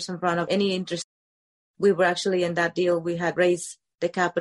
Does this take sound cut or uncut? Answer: uncut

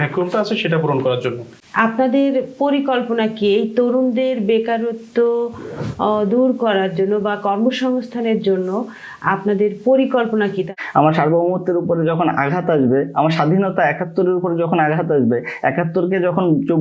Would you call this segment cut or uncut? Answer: cut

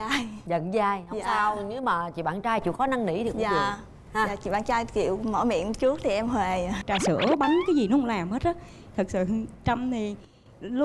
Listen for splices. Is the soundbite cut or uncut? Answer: cut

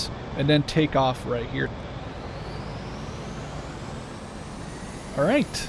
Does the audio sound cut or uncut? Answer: cut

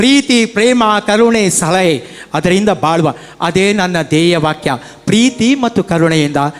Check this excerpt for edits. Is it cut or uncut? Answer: uncut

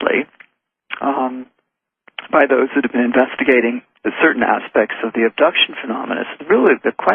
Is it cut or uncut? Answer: cut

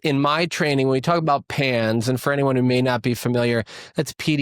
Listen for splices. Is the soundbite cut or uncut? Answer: uncut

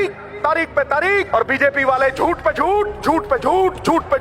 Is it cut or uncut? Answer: cut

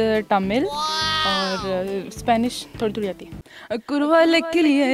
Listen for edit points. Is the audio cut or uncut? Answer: cut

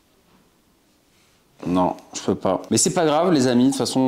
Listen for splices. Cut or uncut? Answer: cut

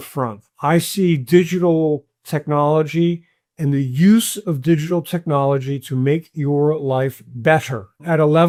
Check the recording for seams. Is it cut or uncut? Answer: uncut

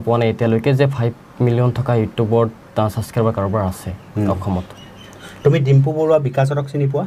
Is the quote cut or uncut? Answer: uncut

